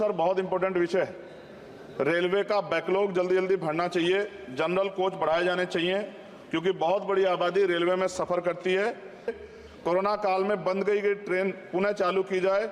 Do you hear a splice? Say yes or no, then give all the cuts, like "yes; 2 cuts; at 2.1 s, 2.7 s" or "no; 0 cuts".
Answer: yes; 1 cut; at 9.4 s